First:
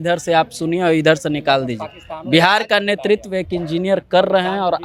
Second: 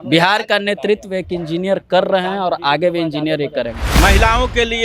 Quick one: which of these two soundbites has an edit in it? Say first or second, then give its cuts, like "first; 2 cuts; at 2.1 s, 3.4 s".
second; 1 cut; at 3.8 s